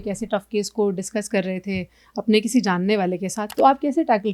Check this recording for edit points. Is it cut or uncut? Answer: cut